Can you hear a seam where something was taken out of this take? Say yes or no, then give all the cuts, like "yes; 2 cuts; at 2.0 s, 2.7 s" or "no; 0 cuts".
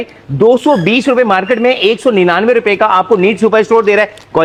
no; 0 cuts